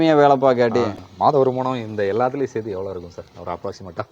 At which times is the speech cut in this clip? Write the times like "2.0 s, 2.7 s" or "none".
1.1 s